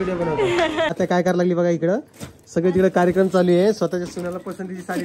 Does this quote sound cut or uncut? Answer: cut